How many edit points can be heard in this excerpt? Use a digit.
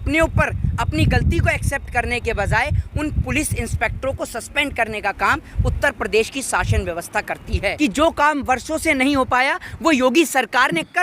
1